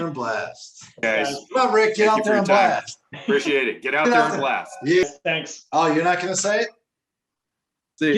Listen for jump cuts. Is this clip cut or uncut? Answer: cut